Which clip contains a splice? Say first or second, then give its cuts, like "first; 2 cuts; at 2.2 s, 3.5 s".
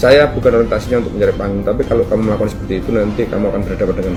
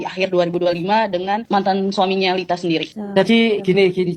second; 2 cuts; at 1.4 s, 3.0 s